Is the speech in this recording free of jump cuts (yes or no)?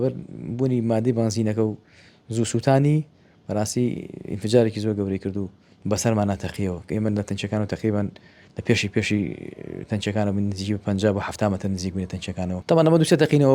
no